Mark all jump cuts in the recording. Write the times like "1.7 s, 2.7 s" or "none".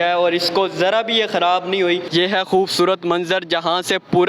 2.1 s